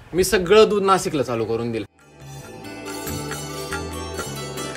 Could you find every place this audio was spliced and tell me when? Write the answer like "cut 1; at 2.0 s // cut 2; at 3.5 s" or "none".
cut 1; at 1.9 s